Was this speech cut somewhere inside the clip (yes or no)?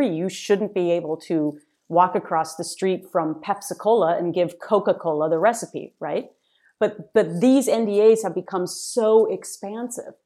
no